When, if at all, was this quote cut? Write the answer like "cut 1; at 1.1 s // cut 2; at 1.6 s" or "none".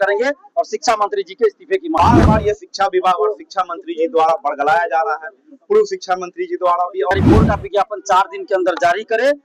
cut 1; at 2.0 s // cut 2; at 7.1 s